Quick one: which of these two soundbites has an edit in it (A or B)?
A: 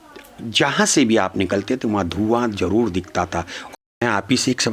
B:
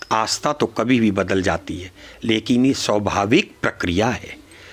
A